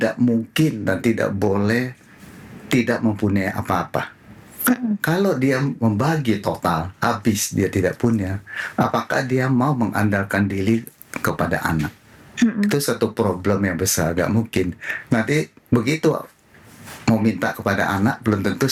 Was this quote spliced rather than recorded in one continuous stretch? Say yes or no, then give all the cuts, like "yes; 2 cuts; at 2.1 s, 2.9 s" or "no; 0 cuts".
no; 0 cuts